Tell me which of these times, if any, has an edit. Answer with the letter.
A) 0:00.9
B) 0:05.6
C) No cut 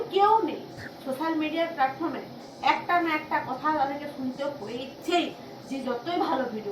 A